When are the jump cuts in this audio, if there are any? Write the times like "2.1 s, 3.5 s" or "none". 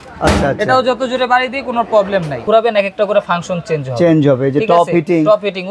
2.4 s